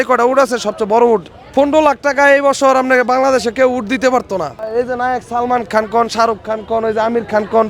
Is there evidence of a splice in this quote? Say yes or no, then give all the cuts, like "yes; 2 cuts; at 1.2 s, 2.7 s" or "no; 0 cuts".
yes; 2 cuts; at 1.3 s, 4.7 s